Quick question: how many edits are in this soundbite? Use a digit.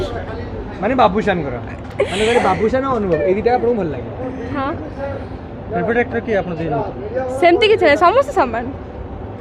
0